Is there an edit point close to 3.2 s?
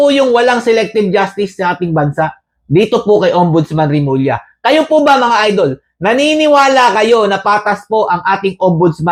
no; 0 cuts

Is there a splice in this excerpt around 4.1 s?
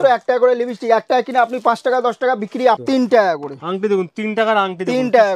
no; 1 cut; at 2.8 s

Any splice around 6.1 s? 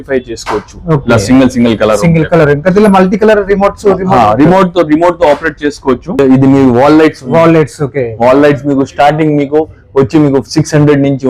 yes; 1 cut; at 6.1 s

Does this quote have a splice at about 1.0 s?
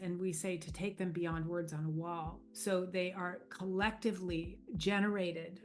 no; 2 cuts; at 2.4 s, 4.6 s

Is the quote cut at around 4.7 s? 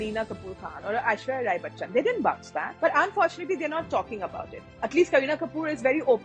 no; 0 cuts

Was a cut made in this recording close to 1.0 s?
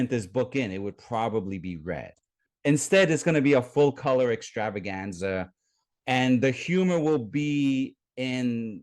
no; 1 cut; at 2.5 s

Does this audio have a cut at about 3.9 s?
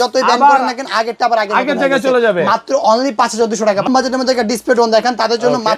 yes; 1 cut; at 3.9 s

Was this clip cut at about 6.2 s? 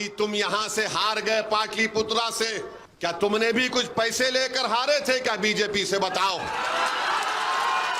no; 1 cut; at 2.8 s

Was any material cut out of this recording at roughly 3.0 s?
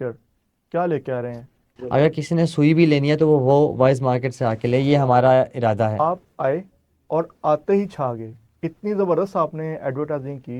no; 2 cuts; at 1.7 s, 6.0 s

